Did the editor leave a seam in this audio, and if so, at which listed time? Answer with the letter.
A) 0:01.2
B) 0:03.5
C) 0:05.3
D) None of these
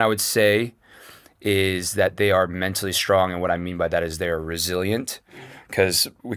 D